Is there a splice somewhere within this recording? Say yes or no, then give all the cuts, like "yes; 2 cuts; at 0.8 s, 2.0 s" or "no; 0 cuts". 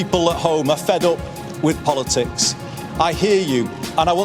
no; 0 cuts